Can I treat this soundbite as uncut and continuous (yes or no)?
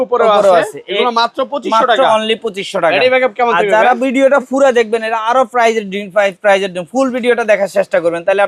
yes